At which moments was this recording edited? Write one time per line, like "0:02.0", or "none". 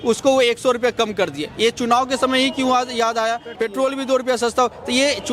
0:03.5